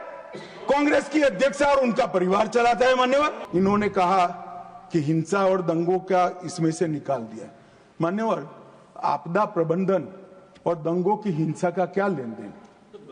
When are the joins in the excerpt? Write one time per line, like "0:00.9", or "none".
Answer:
0:03.4